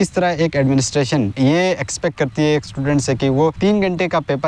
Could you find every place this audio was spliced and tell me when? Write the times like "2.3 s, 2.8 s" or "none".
1.3 s, 3.6 s